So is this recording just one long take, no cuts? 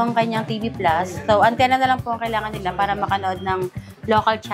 yes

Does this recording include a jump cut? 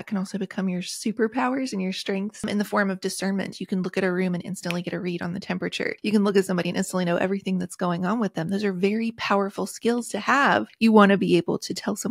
yes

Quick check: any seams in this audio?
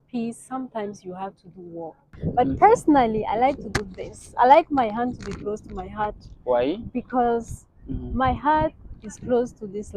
yes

